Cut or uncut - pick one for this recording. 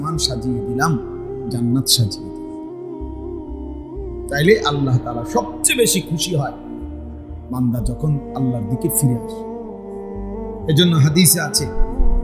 uncut